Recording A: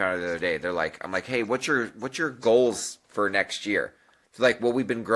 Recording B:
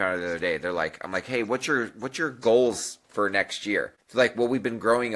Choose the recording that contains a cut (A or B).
B